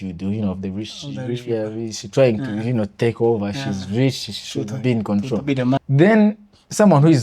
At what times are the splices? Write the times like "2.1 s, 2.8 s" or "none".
5.8 s